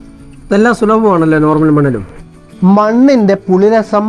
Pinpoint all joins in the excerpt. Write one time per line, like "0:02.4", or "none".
0:02.1